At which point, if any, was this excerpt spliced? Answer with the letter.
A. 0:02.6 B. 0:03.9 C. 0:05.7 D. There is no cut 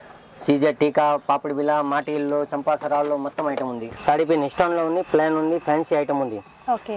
B